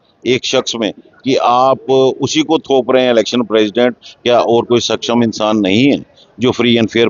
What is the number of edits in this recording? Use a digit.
0